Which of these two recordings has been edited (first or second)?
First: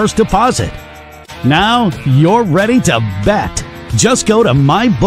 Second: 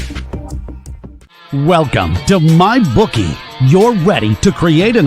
second